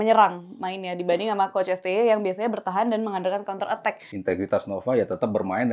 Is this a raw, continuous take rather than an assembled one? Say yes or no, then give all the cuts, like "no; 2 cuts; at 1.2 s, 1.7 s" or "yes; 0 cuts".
no; 1 cut; at 4.1 s